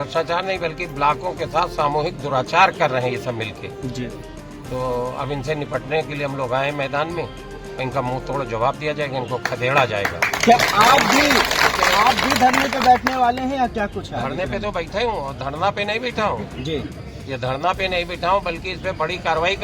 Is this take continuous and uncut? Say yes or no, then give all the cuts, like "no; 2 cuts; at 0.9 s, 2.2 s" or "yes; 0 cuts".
yes; 0 cuts